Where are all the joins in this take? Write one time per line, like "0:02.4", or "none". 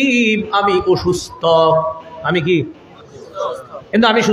none